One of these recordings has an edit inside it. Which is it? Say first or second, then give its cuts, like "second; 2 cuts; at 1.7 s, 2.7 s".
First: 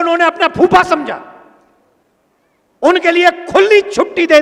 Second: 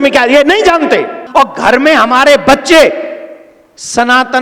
second; 1 cut; at 1.2 s